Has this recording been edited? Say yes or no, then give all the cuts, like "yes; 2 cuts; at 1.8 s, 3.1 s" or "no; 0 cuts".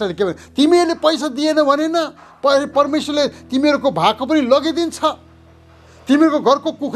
no; 0 cuts